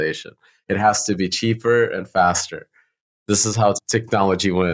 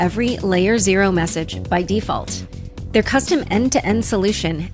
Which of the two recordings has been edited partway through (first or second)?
first